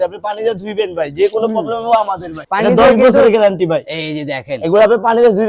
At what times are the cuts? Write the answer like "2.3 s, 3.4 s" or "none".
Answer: none